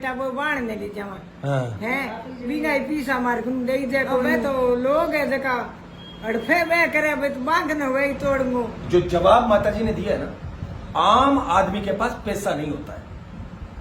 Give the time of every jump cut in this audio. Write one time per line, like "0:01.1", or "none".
0:04.4
0:08.8